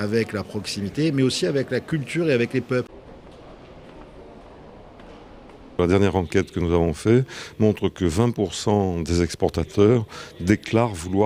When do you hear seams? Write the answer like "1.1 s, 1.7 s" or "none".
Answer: 3.0 s